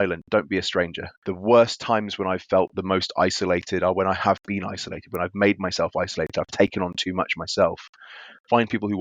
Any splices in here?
yes; 1 cut; at 1.0 s

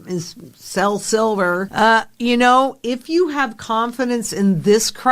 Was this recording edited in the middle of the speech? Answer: yes; 1 cut; at 1.7 s

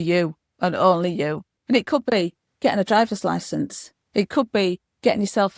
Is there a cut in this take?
no; 0 cuts

